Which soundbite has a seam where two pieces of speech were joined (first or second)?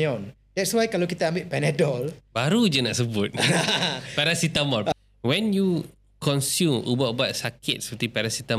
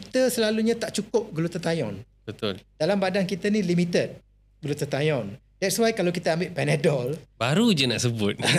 first